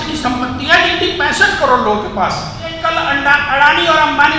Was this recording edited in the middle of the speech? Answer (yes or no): yes